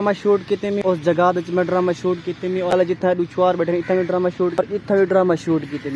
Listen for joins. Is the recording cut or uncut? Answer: cut